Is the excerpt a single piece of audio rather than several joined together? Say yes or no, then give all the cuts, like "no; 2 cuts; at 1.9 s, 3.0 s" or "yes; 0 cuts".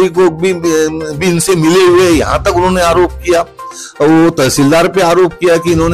yes; 0 cuts